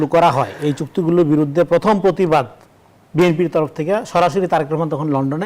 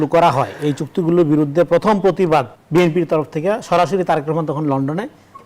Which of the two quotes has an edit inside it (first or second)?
second